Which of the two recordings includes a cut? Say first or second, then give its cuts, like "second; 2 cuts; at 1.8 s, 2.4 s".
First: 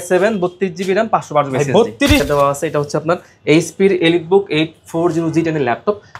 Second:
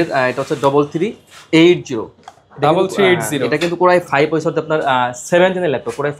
first; 1 cut; at 2.2 s